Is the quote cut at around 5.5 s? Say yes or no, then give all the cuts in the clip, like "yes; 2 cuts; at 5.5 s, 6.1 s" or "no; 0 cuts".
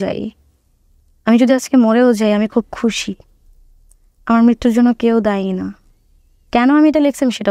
no; 0 cuts